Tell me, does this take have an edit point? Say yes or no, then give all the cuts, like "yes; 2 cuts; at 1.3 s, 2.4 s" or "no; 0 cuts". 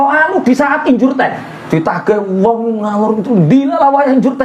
yes; 1 cut; at 1.5 s